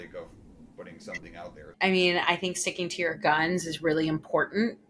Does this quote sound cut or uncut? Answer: cut